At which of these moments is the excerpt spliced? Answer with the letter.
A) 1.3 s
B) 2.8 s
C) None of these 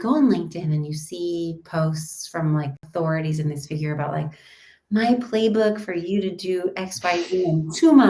B